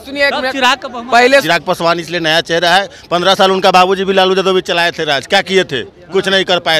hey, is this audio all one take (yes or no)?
no